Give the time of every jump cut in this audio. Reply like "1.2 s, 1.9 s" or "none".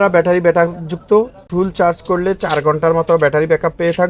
1.4 s